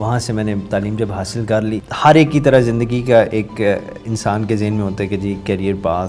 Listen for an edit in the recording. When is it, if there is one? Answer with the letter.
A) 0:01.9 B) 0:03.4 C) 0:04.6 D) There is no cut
A